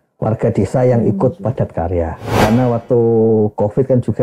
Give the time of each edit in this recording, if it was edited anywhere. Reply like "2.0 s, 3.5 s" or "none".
2.4 s